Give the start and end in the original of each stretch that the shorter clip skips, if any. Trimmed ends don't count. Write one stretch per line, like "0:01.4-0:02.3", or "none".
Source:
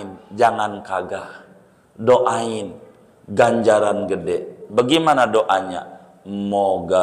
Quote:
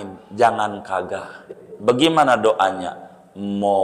0:01.6-0:04.5